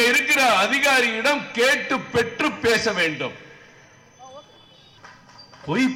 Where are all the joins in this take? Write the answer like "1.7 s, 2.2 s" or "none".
5.0 s